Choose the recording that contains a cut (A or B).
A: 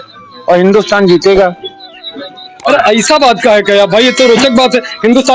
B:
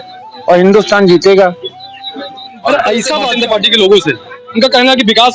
B